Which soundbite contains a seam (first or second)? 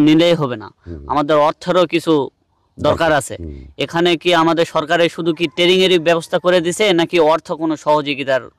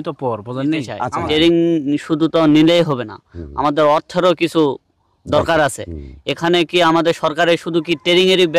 second